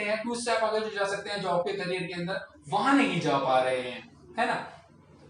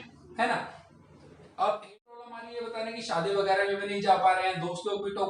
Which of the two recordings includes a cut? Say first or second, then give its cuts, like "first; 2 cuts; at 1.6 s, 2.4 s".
second; 1 cut; at 2.5 s